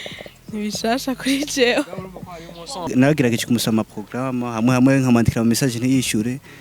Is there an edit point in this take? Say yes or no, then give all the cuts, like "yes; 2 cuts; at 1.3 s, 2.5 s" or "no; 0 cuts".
yes; 1 cut; at 2.9 s